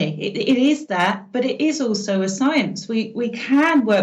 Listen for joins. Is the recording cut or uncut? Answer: uncut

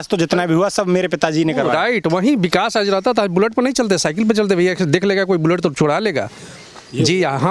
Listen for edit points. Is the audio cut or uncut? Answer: uncut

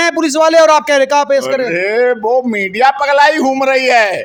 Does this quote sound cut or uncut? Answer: uncut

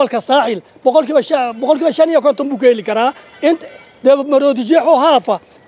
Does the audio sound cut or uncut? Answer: uncut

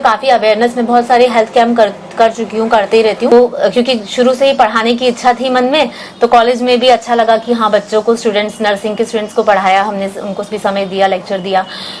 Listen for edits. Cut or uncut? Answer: cut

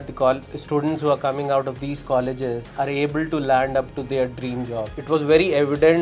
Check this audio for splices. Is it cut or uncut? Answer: cut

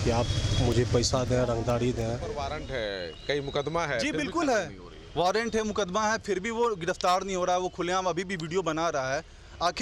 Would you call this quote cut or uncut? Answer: cut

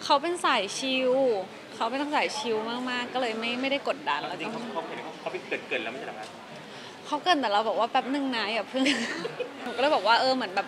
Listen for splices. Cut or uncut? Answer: cut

